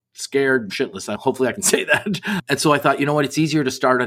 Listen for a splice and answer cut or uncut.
cut